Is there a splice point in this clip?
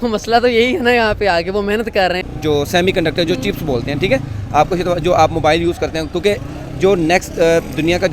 yes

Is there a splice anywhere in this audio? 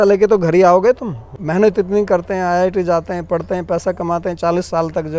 yes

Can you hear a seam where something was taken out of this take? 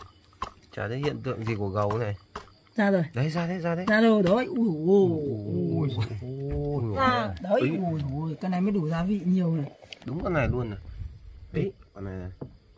yes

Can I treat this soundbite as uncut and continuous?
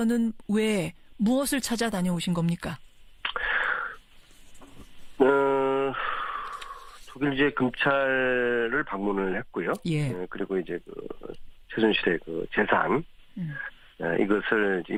yes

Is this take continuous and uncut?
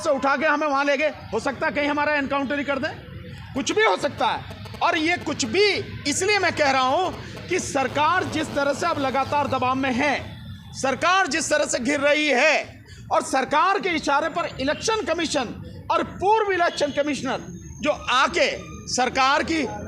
yes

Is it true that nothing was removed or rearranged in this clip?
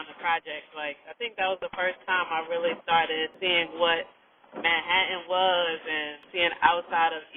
no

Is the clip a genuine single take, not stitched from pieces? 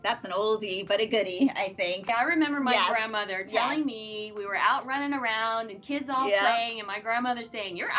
yes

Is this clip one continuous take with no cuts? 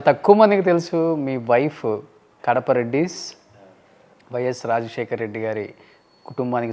yes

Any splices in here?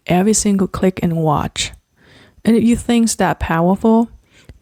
no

